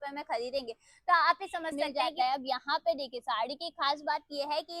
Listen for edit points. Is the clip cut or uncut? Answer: cut